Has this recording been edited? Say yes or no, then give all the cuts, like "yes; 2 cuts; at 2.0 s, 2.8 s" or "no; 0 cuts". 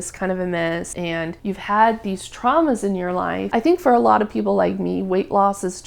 yes; 2 cuts; at 1.1 s, 3.4 s